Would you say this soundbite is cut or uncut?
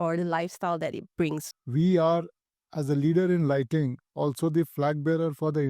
cut